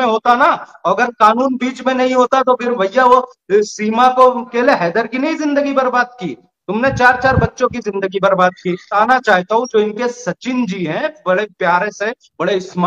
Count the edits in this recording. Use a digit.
2